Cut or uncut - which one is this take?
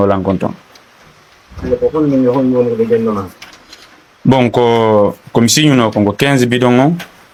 uncut